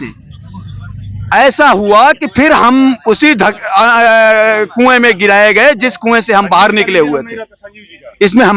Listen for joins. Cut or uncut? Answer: uncut